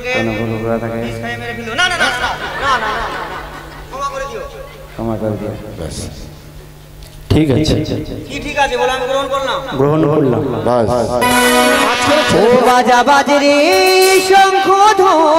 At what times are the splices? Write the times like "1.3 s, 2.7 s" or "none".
12.3 s